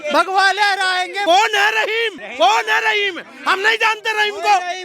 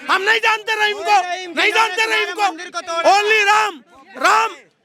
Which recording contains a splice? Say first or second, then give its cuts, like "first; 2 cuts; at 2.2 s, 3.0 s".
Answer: first; 2 cuts; at 1.2 s, 2.2 s